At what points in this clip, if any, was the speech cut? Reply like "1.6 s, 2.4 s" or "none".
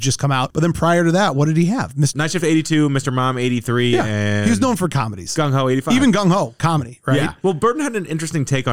2.1 s, 7.4 s